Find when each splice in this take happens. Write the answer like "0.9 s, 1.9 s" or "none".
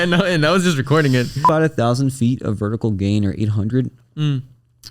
1.5 s